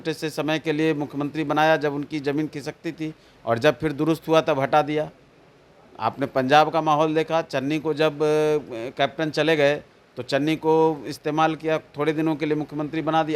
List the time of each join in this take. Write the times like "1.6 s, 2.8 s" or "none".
none